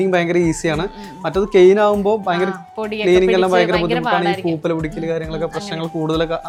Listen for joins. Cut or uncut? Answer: uncut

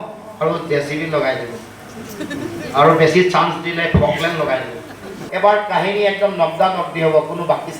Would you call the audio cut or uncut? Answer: cut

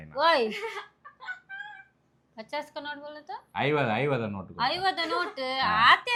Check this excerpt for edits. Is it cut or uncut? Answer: uncut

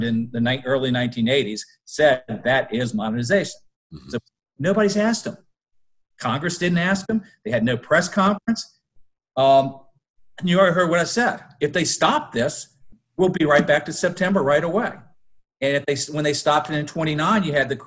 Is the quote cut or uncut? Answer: uncut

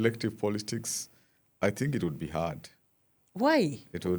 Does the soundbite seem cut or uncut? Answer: uncut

